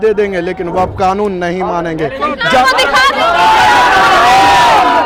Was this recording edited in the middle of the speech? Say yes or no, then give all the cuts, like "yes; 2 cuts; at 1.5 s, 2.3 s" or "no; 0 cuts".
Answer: no; 0 cuts